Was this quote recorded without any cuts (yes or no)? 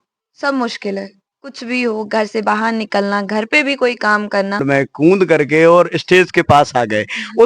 no